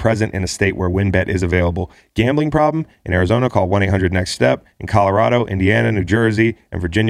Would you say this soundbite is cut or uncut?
uncut